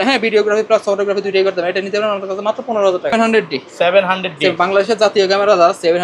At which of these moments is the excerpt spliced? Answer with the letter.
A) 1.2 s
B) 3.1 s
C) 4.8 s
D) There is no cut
B